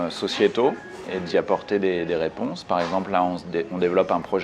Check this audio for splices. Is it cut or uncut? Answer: uncut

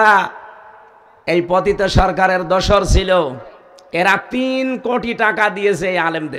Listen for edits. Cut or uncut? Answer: uncut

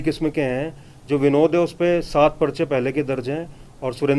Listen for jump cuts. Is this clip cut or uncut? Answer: uncut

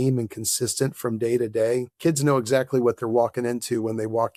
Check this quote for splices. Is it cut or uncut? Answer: uncut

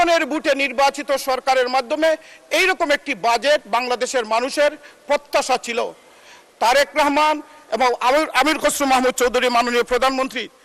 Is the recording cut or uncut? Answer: uncut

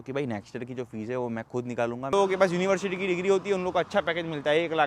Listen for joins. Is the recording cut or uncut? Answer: cut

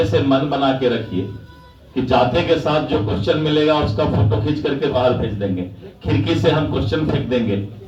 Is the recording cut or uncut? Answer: uncut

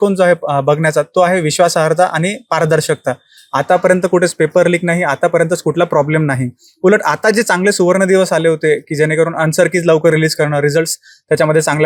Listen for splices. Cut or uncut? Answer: uncut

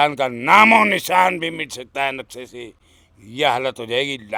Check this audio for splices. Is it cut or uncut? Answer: uncut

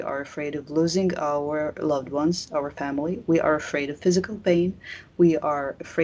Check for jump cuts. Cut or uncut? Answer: uncut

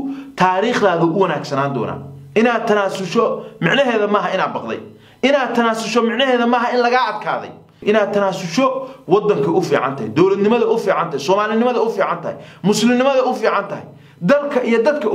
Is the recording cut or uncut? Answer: cut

